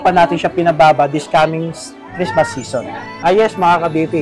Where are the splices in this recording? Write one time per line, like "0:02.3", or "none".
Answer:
0:03.1

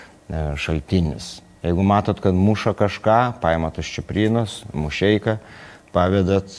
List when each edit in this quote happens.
none

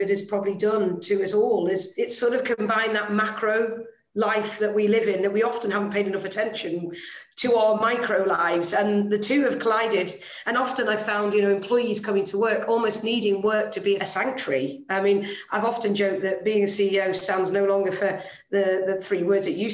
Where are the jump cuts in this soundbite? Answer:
0:01.9
0:14.1

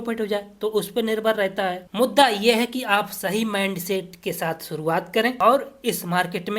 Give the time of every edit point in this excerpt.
0:01.8
0:05.4

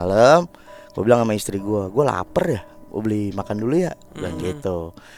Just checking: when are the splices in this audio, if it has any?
none

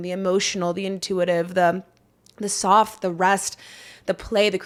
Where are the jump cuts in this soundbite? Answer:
none

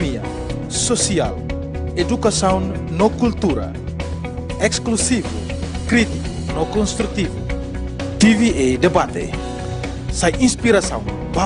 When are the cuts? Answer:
none

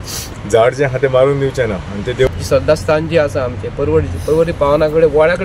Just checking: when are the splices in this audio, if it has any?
0:02.3

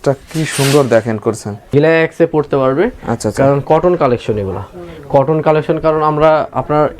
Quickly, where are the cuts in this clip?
0:01.7

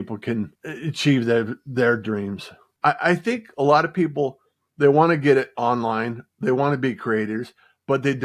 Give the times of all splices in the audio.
0:02.7

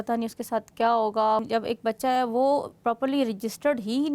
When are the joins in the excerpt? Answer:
0:01.5

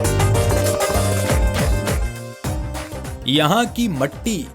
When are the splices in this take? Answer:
none

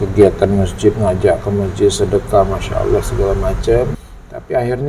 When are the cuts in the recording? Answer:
0:04.0

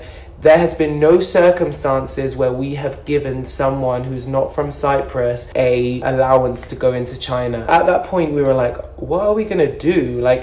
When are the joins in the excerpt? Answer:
0:06.0
0:07.7

